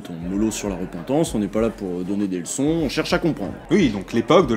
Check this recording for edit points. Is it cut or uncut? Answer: cut